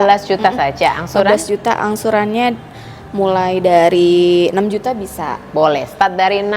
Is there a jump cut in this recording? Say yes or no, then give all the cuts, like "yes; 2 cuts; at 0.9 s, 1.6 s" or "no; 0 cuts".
no; 0 cuts